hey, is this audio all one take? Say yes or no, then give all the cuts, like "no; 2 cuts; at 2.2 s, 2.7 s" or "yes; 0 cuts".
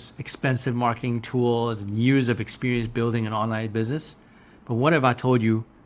yes; 0 cuts